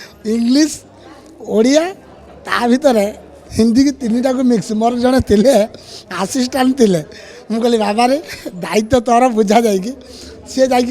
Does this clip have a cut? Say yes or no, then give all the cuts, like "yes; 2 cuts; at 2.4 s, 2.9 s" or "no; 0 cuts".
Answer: no; 0 cuts